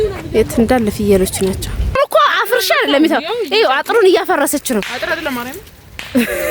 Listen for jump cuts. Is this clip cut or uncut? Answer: cut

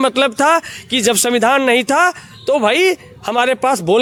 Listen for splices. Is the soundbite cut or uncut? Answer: uncut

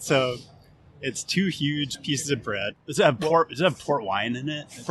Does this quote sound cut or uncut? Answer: cut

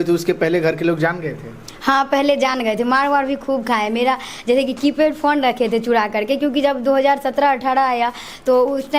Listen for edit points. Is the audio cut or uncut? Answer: uncut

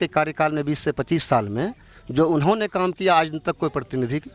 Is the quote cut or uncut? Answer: uncut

